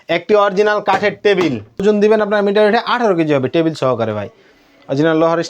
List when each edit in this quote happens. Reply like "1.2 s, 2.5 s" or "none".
1.8 s